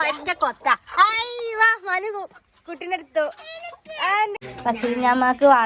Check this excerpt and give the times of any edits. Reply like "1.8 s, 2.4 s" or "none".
4.4 s